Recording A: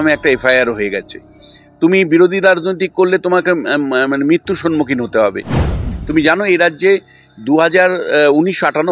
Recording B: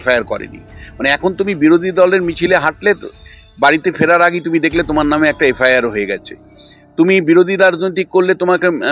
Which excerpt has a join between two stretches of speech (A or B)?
A